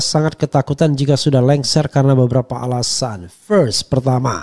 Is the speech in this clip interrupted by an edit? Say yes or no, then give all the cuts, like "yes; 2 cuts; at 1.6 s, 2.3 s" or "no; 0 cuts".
no; 0 cuts